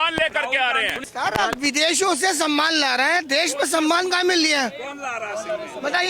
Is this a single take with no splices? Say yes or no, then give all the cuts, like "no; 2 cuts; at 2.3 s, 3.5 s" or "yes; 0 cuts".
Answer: no; 1 cut; at 1.0 s